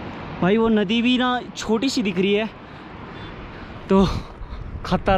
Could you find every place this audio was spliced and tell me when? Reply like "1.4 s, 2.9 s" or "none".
none